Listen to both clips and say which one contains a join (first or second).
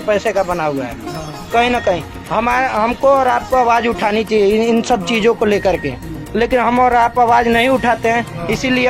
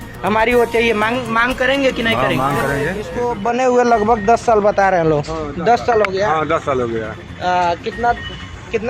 second